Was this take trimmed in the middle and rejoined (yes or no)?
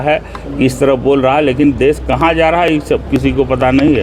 no